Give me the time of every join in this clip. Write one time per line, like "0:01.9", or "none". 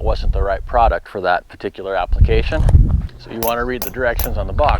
0:03.0